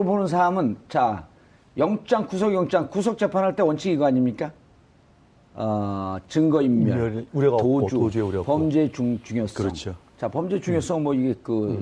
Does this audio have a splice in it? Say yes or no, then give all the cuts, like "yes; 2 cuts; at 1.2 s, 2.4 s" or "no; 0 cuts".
no; 0 cuts